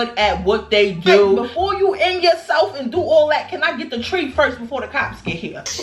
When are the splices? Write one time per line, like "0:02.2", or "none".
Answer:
0:01.5

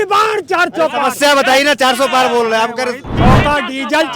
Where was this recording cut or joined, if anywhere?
0:03.1

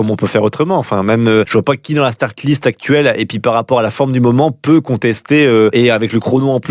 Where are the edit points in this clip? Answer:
0:01.5
0:05.7

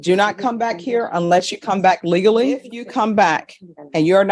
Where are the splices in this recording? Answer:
0:02.8

